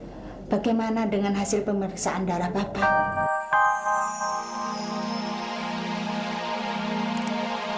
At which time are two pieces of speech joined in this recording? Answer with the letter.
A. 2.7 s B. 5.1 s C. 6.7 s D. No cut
A